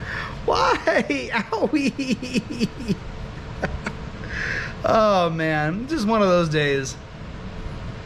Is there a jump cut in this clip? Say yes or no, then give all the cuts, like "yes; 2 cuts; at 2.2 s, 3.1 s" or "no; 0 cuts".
no; 0 cuts